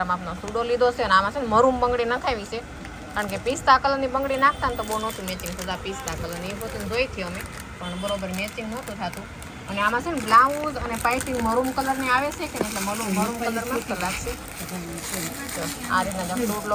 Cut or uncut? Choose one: uncut